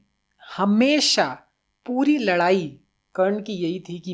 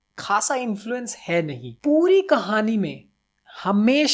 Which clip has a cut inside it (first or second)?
second